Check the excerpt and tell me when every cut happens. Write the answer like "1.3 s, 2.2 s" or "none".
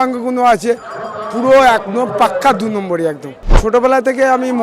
3.3 s